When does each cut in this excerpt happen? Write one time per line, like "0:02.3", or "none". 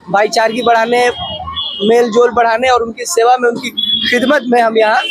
none